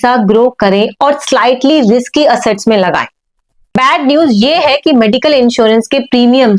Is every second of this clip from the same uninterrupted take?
no; 1 cut; at 3.6 s

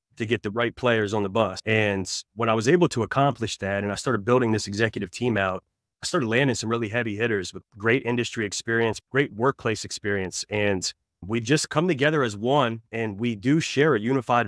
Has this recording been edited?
yes; 2 cuts; at 1.6 s, 9.0 s

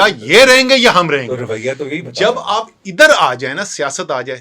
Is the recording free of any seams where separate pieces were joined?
yes; 0 cuts

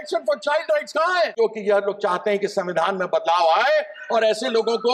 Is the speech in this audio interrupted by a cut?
yes; 1 cut; at 1.3 s

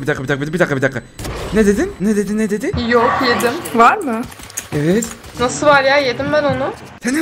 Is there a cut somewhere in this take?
yes; 1 cut; at 2.8 s

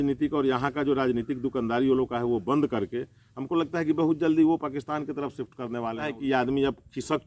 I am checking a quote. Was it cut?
yes; 1 cut; at 6.1 s

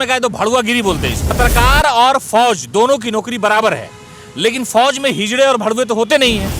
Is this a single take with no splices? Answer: no; 1 cut; at 1.4 s

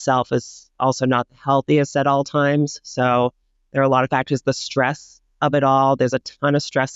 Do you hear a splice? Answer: no; 0 cuts

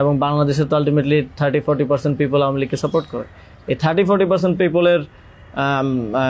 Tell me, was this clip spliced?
no; 0 cuts

